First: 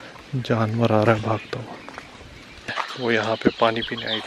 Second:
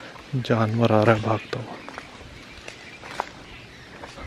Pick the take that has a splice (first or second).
first